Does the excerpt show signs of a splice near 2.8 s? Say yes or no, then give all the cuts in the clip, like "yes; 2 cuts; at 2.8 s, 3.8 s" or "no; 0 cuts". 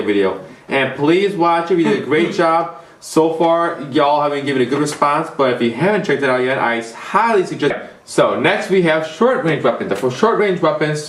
no; 0 cuts